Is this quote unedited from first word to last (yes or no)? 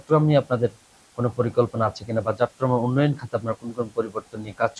yes